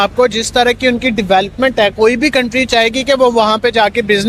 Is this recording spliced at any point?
no; 0 cuts

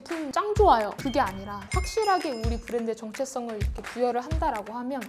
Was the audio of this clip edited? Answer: yes; 1 cut; at 0.9 s

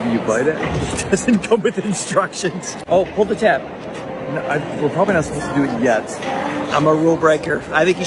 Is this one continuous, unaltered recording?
yes; 0 cuts

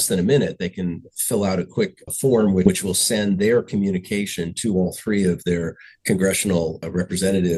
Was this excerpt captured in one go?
yes; 0 cuts

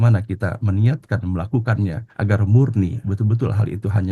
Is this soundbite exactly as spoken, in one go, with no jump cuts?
no; 1 cut; at 2.1 s

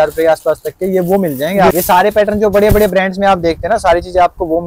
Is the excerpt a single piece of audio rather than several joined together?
no; 1 cut; at 1.7 s

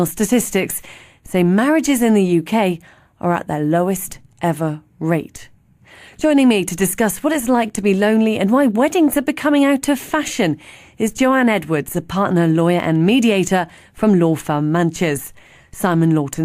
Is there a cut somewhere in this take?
yes; 1 cut; at 3.2 s

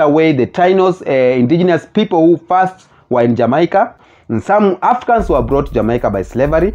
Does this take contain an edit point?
yes; 1 cut; at 3.9 s

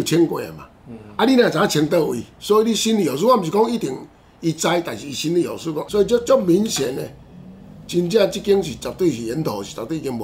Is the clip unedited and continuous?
no; 2 cuts; at 2.3 s, 5.8 s

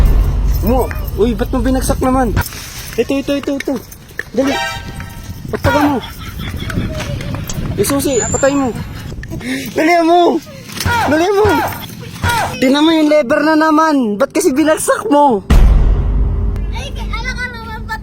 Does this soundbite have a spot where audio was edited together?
yes; 4 cuts; at 2.4 s, 9.4 s, 12.5 s, 16.6 s

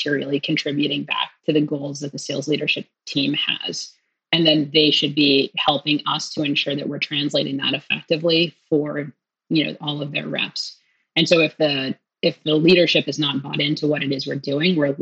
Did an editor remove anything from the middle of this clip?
no; 0 cuts

